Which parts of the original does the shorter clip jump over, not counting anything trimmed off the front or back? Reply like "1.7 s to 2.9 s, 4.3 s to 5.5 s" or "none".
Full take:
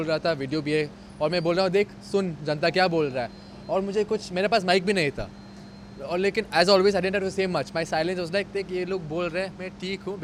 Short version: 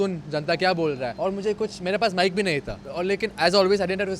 3.2 s to 3.6 s, 5.3 s to 5.9 s

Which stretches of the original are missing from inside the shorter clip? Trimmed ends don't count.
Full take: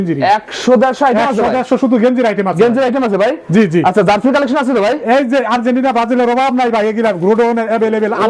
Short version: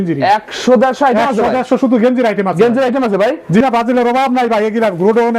3.6 s to 5.8 s

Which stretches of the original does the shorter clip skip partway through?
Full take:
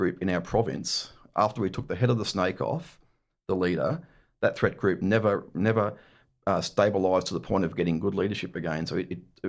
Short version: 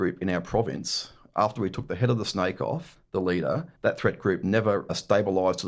2.9 s to 3.3 s, 4.0 s to 4.3 s, 5.5 s to 6.6 s

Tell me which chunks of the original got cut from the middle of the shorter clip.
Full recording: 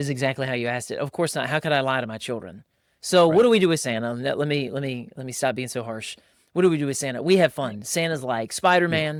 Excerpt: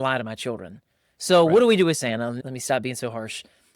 4.2 s to 5.1 s

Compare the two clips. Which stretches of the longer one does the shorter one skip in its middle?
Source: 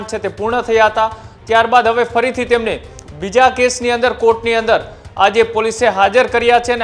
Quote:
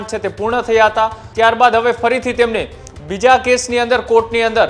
1.2 s to 1.3 s

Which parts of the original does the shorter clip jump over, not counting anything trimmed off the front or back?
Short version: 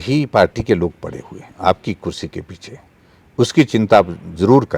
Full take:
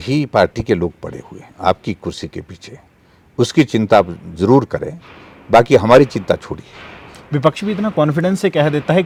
none

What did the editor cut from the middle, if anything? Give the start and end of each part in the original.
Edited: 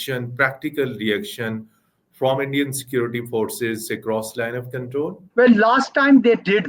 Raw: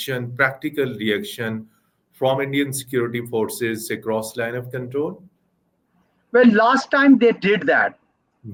5.2 s to 6.2 s

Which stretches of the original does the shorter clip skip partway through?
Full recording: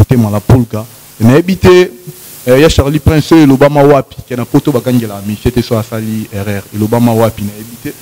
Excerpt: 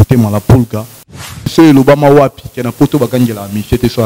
1.2 s to 2.9 s

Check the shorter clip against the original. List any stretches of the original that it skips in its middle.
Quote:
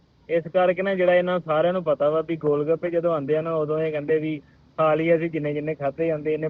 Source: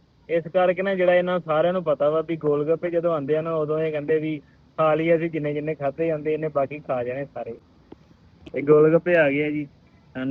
none

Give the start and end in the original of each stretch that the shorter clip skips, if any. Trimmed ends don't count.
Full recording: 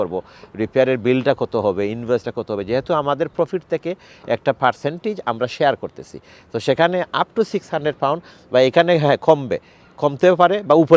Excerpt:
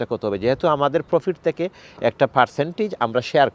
none

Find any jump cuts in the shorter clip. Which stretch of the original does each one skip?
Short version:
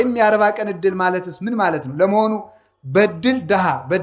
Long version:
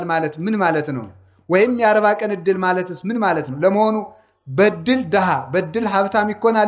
none

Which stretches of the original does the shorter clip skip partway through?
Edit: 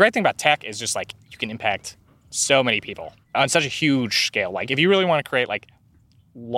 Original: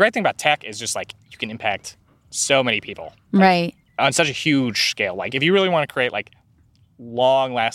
3.2 s to 3.8 s

